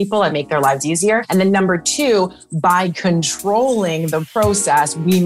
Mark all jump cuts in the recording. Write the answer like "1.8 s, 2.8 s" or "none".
none